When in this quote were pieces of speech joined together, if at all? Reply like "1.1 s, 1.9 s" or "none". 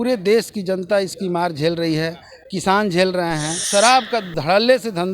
3.5 s